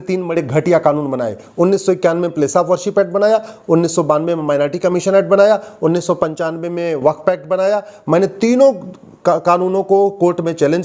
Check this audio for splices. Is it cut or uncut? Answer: uncut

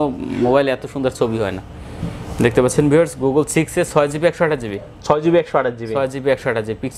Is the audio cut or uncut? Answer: uncut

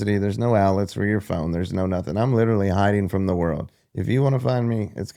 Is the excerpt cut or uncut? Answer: uncut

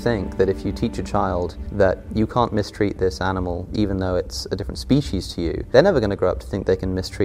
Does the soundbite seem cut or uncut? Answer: cut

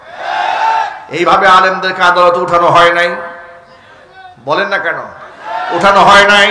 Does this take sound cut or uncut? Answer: uncut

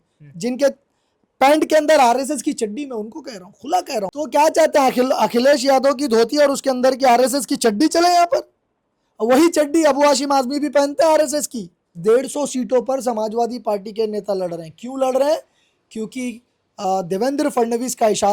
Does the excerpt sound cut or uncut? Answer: cut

